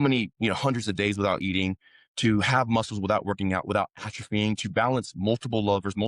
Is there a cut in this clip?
no; 0 cuts

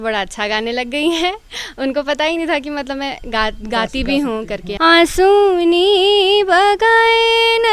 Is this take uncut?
no; 1 cut; at 4.6 s

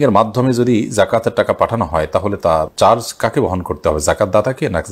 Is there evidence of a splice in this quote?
no; 0 cuts

